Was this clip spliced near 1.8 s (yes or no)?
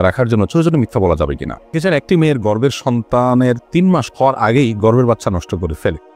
yes